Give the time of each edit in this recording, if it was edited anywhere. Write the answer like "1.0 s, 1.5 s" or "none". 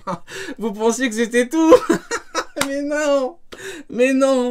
none